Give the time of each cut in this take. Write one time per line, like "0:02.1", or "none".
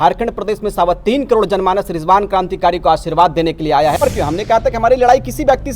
0:04.0